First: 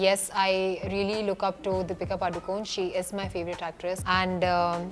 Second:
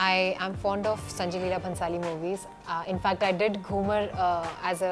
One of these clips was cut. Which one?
first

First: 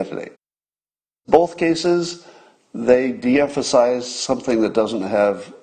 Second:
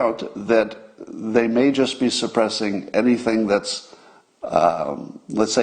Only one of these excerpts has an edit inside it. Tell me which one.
first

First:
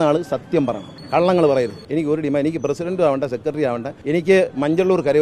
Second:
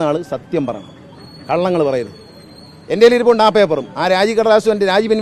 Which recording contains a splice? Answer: first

